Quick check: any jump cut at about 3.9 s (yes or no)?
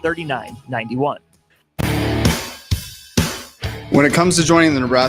no